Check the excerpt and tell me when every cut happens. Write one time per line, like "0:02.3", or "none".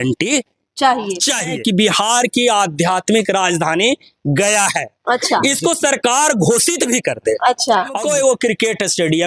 0:01.4
0:08.0